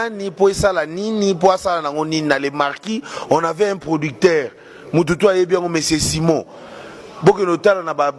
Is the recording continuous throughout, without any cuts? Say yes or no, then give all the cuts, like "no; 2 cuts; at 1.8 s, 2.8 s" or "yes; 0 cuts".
yes; 0 cuts